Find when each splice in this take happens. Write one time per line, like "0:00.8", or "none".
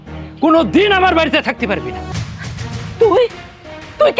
0:02.1